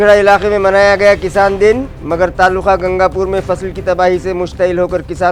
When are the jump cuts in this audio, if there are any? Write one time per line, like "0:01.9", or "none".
none